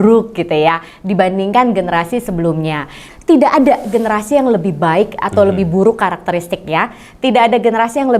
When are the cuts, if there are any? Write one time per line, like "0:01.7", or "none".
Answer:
0:03.1